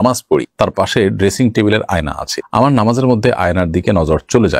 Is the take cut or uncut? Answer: uncut